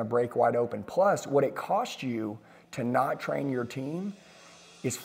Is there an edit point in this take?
no; 0 cuts

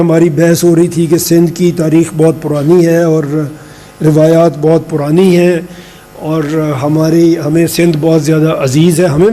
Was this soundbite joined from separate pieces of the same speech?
no; 0 cuts

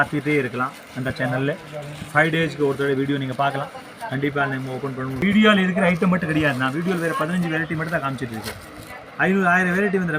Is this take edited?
yes; 1 cut; at 5.2 s

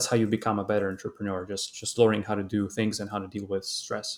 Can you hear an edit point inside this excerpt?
no; 0 cuts

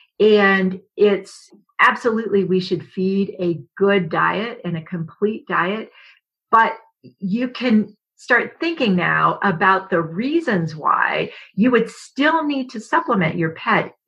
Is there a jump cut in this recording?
yes; 1 cut; at 1.4 s

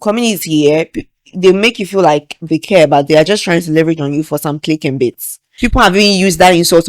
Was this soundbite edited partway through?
yes; 1 cut; at 5.5 s

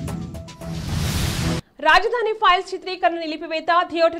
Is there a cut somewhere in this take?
yes; 1 cut; at 1.6 s

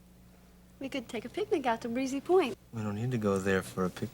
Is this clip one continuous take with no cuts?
no; 1 cut; at 2.7 s

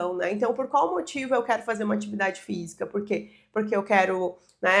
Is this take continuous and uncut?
yes; 0 cuts

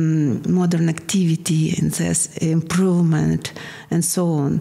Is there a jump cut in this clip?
no; 0 cuts

